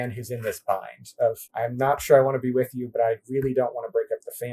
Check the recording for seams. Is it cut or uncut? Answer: cut